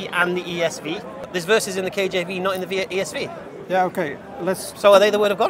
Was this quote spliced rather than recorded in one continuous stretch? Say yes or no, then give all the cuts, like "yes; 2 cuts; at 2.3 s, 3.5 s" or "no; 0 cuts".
yes; 1 cut; at 1.3 s